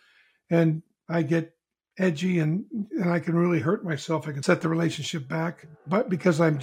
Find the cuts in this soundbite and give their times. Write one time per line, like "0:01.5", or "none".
0:04.3
0:05.7